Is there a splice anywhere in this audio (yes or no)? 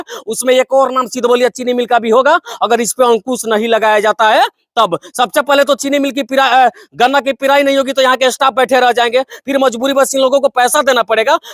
no